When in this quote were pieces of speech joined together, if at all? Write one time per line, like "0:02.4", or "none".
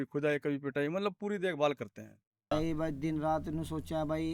0:02.5